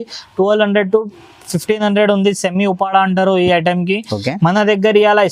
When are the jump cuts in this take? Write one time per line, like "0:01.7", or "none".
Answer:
none